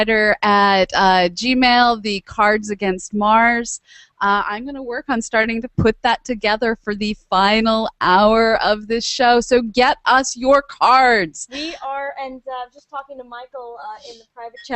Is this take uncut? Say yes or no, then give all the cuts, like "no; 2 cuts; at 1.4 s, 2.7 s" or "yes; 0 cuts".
no; 1 cut; at 12.7 s